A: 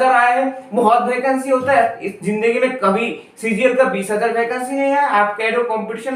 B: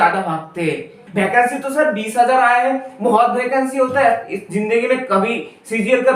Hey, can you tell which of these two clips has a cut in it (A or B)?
B